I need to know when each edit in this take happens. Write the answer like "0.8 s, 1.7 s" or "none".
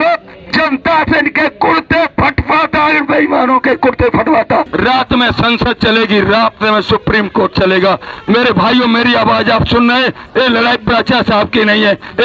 4.7 s